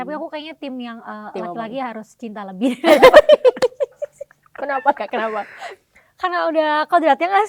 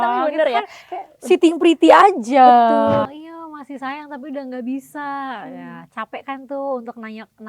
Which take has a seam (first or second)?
second